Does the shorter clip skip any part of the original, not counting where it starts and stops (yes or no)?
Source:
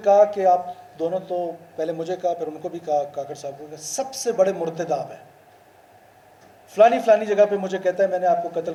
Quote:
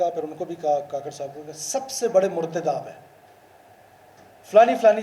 no